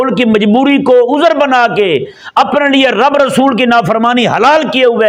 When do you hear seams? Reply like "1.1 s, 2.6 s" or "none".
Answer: none

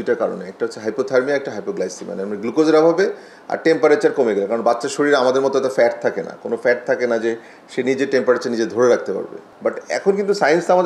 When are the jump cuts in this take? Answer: none

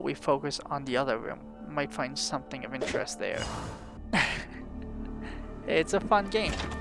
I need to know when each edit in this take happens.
3.9 s

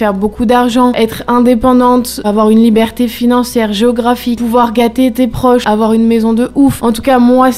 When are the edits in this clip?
1.0 s, 2.2 s, 4.4 s, 5.6 s, 6.8 s

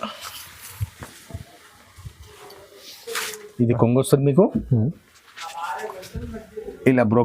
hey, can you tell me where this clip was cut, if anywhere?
3.0 s

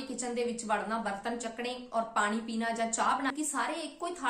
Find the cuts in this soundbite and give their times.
3.3 s

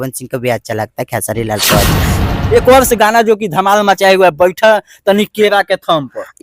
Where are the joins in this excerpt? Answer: 2.1 s

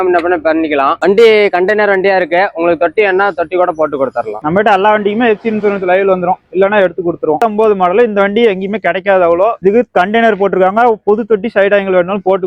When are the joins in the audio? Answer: 4.4 s, 7.4 s

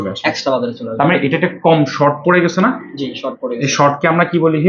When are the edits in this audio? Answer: none

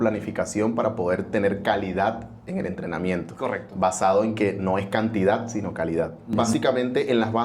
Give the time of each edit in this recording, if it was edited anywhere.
6.4 s

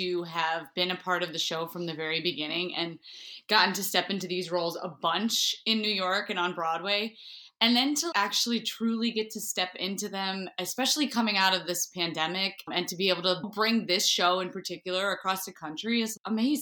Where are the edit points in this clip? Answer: none

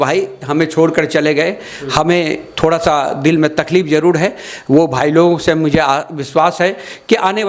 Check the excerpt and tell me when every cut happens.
none

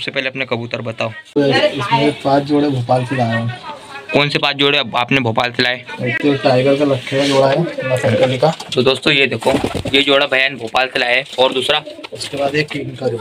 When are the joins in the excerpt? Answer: 1.4 s

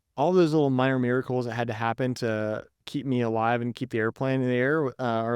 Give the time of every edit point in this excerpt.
2.8 s

